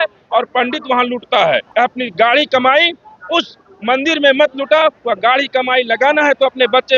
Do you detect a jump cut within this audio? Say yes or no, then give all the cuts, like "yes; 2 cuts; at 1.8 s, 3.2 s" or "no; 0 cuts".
yes; 1 cut; at 1.7 s